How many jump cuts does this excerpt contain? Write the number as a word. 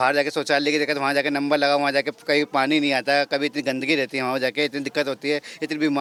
zero